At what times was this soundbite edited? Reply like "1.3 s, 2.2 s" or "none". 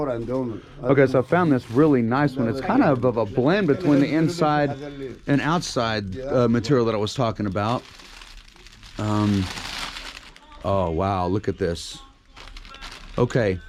none